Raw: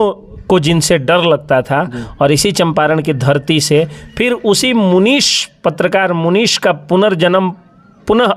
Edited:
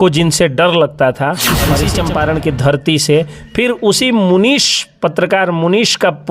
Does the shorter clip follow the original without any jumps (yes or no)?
no